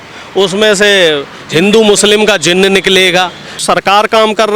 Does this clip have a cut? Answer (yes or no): yes